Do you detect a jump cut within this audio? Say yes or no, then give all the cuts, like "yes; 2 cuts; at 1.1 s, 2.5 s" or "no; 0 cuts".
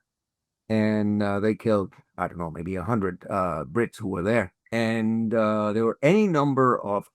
yes; 1 cut; at 4.6 s